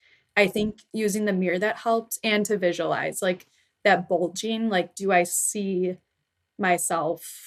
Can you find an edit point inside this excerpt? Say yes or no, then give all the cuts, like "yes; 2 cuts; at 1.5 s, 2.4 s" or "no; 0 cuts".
no; 0 cuts